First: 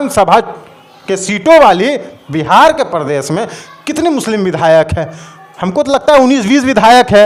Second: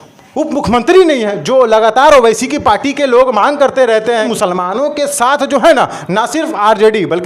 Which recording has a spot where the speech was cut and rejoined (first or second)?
second